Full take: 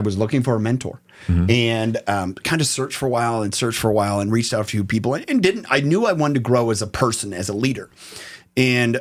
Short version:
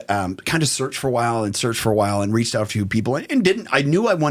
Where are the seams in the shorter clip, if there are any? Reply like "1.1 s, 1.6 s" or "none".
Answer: none